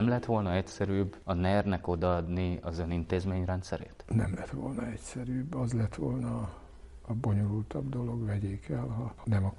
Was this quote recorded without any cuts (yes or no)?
yes